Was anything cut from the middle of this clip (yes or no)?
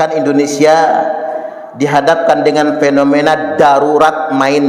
no